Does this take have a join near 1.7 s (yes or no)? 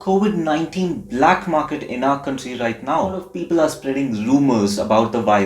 no